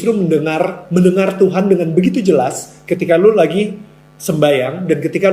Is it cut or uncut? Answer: uncut